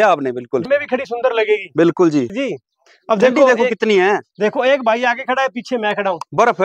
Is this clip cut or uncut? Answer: cut